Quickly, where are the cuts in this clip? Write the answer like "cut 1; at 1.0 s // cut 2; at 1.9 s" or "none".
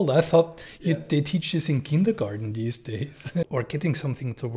cut 1; at 3.5 s

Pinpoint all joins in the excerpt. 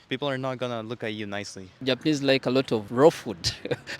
cut 1; at 1.6 s

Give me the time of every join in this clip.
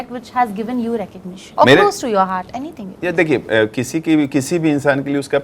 none

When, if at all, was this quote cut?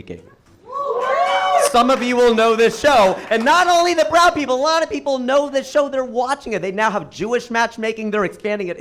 none

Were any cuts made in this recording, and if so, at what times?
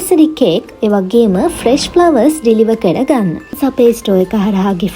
cut 1; at 3.6 s

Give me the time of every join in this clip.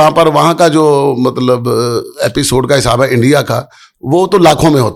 none

